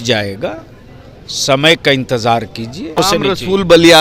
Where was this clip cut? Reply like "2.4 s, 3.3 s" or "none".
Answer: 3.0 s